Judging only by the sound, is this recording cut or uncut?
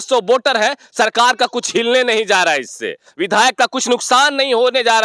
uncut